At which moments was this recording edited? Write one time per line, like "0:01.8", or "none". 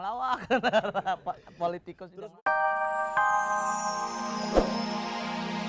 0:02.2